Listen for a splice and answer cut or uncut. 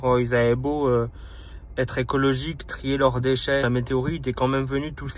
cut